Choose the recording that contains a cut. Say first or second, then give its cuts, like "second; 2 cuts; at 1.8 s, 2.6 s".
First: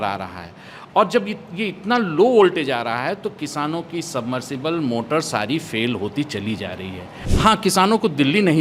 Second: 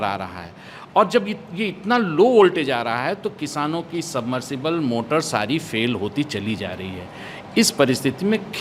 first; 1 cut; at 7.2 s